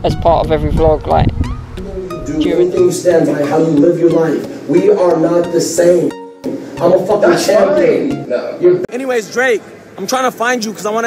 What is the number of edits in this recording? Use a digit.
2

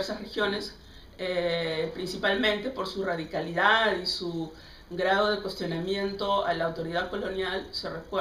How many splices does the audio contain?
1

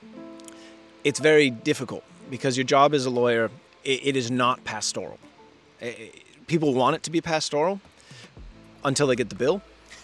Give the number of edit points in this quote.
1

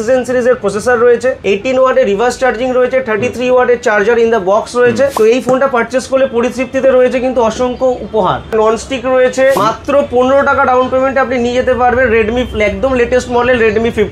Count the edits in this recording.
4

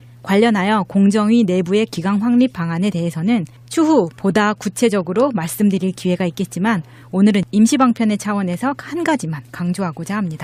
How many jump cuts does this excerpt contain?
0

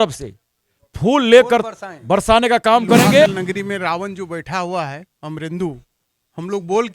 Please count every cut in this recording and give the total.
1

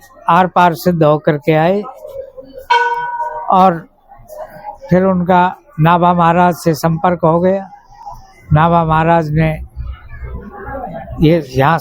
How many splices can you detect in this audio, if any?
0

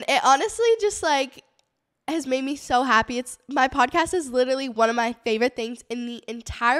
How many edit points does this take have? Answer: 0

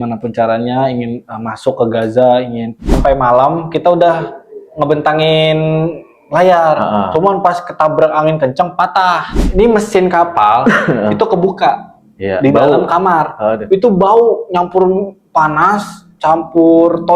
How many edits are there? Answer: 2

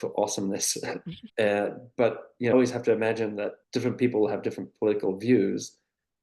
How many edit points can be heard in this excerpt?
0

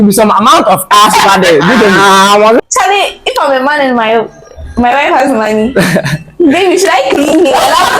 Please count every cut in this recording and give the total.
1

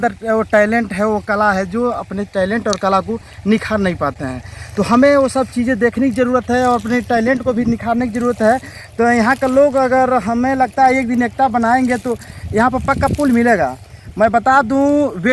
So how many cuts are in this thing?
0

